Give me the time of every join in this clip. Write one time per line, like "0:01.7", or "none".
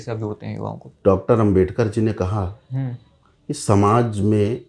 0:01.0